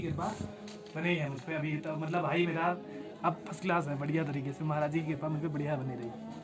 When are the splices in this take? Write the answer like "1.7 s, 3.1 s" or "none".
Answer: none

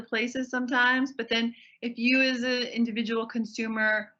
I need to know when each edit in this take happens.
none

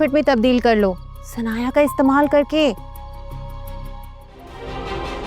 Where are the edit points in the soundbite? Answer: 4.4 s

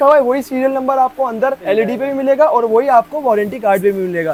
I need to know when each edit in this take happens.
none

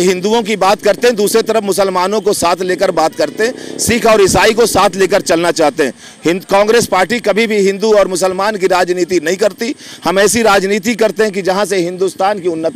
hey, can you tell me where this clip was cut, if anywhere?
none

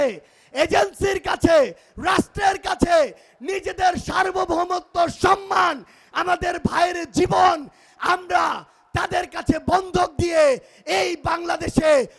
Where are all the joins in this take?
none

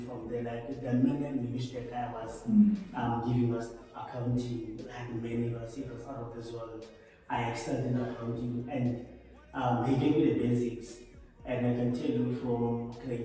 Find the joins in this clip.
none

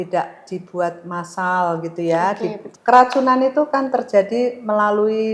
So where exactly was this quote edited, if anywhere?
2.7 s

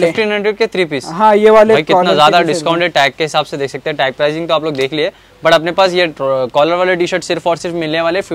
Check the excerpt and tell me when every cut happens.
none

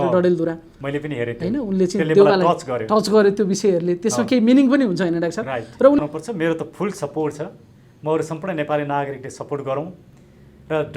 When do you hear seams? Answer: 6.0 s

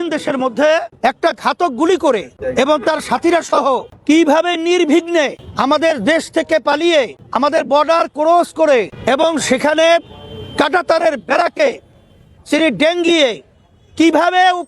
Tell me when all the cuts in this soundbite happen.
0.9 s, 2.4 s, 3.9 s, 5.4 s, 7.2 s, 8.9 s

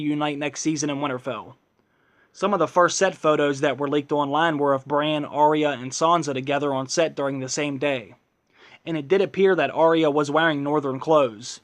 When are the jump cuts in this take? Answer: 2.2 s

